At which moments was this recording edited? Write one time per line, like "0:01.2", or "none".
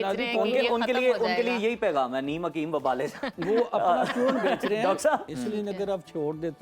0:05.3